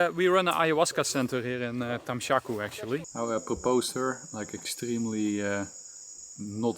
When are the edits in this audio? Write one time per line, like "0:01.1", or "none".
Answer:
0:03.1